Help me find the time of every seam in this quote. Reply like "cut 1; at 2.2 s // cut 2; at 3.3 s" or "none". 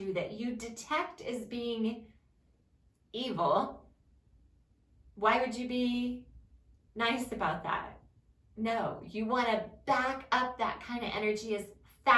none